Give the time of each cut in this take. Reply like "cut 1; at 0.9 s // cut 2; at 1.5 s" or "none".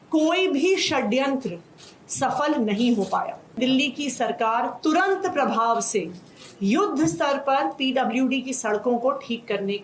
cut 1; at 3.6 s